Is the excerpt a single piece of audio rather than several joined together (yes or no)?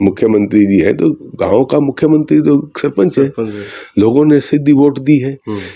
yes